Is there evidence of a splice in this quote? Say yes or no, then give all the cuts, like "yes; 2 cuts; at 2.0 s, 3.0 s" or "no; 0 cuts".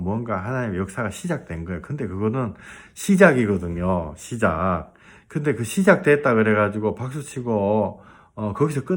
no; 0 cuts